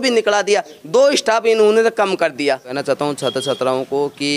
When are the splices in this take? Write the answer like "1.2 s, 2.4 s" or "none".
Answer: 2.8 s